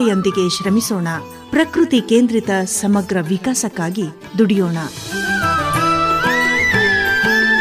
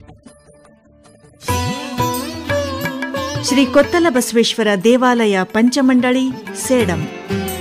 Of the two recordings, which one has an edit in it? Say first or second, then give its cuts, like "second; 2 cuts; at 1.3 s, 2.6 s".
second; 1 cut; at 1.4 s